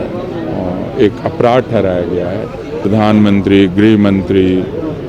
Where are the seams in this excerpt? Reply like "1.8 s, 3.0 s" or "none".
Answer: 2.7 s